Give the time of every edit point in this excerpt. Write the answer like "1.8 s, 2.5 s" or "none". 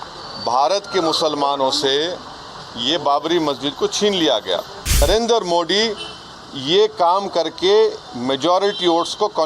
5.0 s

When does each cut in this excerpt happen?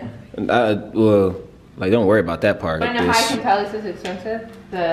2.8 s

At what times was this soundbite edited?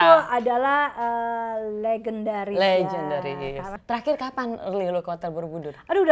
3.7 s

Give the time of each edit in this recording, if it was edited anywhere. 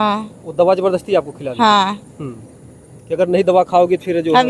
none

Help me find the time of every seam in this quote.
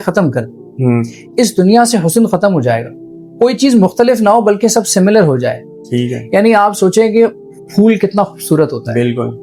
none

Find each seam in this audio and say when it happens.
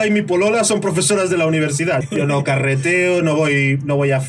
2.0 s

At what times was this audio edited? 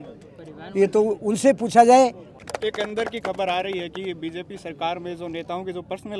2.2 s

